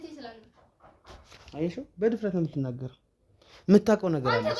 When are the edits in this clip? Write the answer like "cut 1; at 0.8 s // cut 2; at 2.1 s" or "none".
none

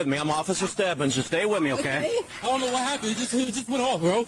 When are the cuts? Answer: cut 1; at 2.3 s

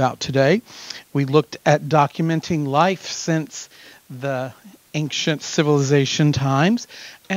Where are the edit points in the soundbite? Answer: none

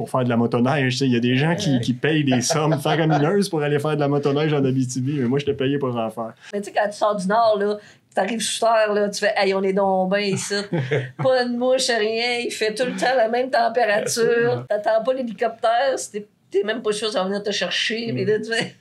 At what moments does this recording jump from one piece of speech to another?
cut 1; at 6.6 s // cut 2; at 14.6 s

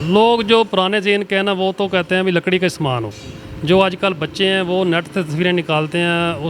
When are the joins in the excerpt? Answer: none

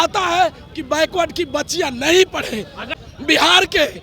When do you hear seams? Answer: cut 1; at 3.0 s

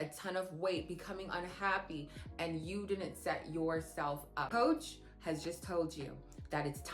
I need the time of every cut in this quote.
cut 1; at 4.5 s

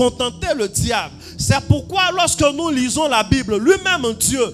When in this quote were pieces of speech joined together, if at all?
none

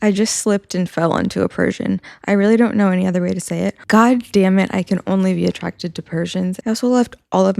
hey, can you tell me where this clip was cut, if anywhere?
cut 1; at 3.8 s // cut 2; at 6.6 s

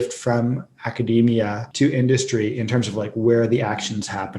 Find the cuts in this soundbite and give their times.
cut 1; at 1.6 s

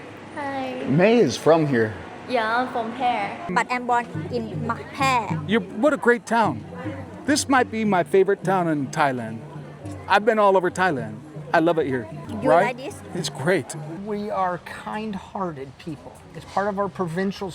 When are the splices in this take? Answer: cut 1; at 3.5 s // cut 2; at 12.2 s // cut 3; at 13.8 s

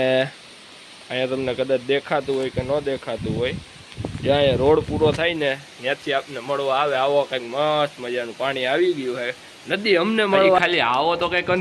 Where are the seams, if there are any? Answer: cut 1; at 10.6 s

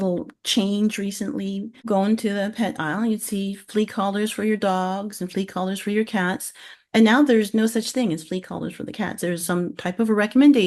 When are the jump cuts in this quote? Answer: cut 1; at 1.7 s

